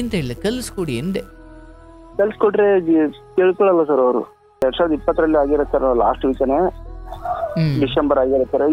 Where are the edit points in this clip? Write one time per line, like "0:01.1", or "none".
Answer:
0:04.6